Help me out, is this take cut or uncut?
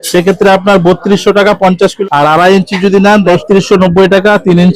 cut